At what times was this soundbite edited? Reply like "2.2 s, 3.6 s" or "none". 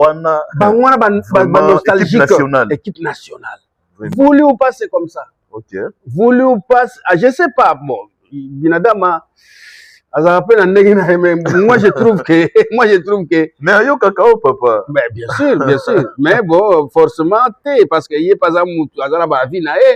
none